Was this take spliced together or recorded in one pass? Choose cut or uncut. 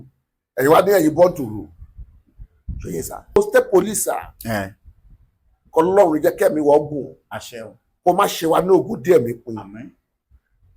cut